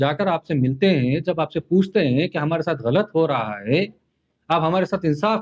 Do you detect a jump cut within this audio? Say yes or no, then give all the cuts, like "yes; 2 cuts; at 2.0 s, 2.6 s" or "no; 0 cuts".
no; 0 cuts